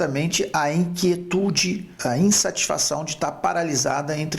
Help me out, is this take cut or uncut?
cut